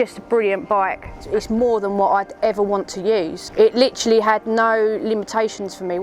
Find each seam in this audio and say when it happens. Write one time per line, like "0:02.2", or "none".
0:01.1
0:03.4